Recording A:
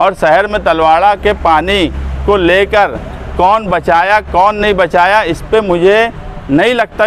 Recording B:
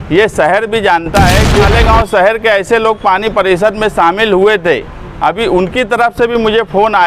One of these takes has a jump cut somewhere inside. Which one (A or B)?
B